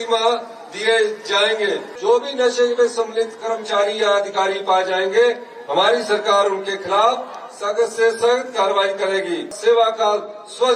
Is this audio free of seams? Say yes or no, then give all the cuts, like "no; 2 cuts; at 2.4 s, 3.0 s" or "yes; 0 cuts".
no; 2 cuts; at 1.9 s, 9.5 s